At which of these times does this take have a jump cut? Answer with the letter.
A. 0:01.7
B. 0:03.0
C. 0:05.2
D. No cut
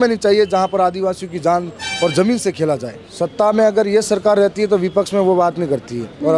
B